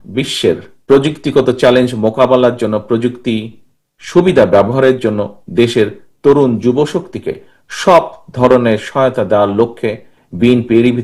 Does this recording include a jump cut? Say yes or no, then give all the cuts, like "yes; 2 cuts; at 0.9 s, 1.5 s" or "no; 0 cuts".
no; 0 cuts